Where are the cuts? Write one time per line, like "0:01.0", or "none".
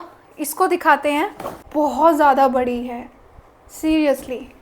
0:01.6